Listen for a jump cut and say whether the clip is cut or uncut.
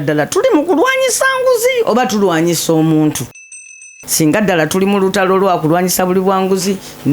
cut